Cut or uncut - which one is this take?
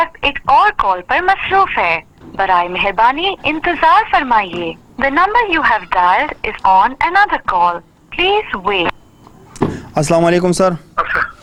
uncut